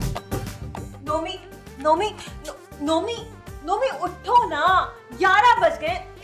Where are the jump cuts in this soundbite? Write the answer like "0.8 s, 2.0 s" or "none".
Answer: none

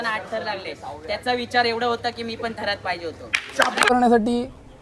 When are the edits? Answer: 3.9 s

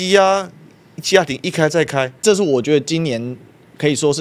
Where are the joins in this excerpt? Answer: 2.2 s

